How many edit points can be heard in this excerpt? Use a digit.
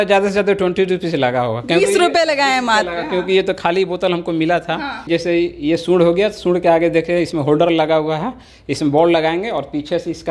1